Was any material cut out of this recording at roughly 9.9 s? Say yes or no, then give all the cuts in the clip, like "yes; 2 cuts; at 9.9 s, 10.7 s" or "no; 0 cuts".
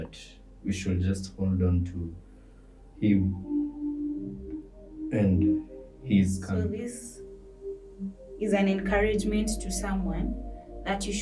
no; 1 cut; at 6.6 s